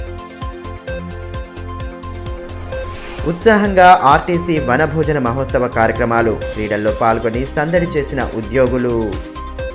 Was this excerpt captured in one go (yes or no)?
no